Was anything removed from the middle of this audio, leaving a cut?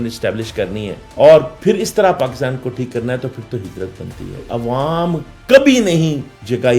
yes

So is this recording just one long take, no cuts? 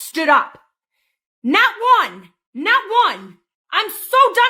yes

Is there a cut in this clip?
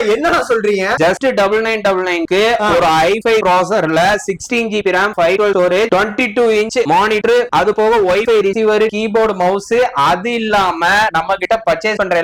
no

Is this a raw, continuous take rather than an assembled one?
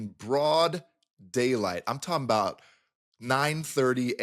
yes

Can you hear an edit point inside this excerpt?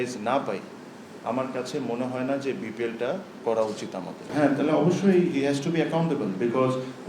yes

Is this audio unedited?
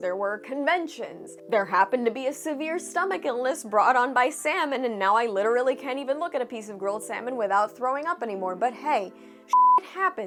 yes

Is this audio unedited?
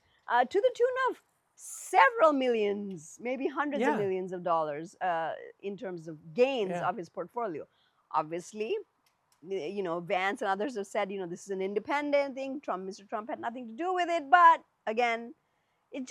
yes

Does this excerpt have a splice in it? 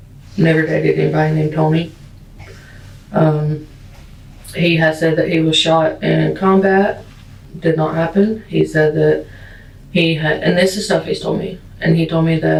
no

